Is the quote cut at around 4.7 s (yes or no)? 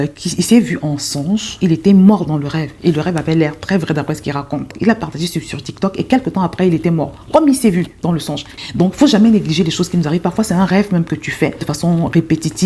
yes